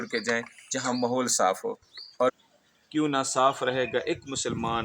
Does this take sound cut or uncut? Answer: cut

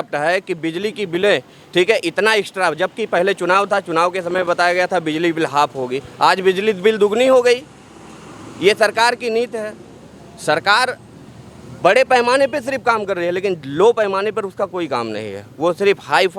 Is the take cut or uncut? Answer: uncut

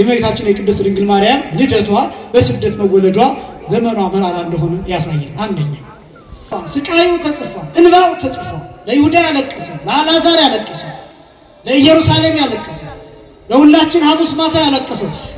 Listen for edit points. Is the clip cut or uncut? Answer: cut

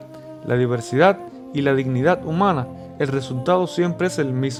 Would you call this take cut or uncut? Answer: uncut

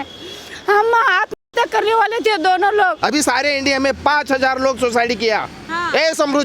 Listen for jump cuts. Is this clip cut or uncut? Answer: cut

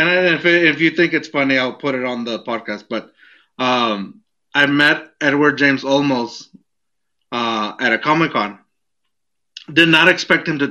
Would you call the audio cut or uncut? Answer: uncut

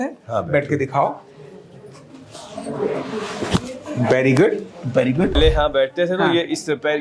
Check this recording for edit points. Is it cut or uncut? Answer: cut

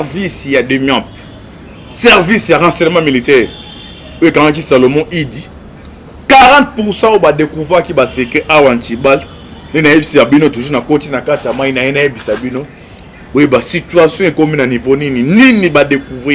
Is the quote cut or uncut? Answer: uncut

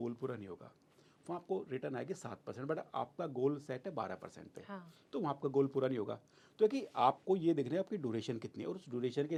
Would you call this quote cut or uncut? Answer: uncut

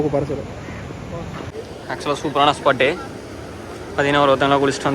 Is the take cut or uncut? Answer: cut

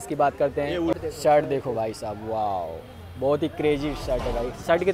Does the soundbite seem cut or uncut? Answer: cut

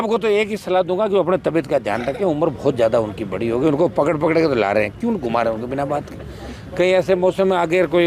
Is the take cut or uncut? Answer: uncut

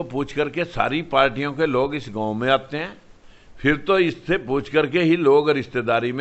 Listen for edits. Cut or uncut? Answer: uncut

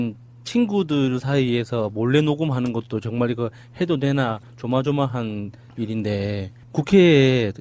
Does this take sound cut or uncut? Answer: cut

